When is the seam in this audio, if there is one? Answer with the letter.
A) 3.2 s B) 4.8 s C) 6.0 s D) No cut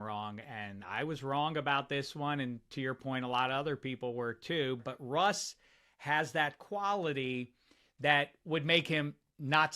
B